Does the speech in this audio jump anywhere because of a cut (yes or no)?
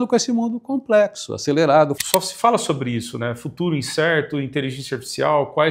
yes